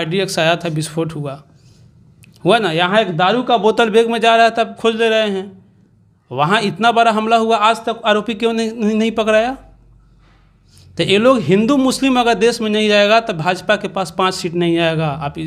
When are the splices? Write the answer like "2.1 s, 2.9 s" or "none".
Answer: none